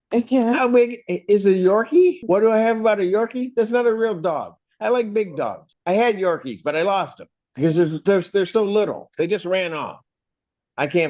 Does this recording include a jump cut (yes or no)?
yes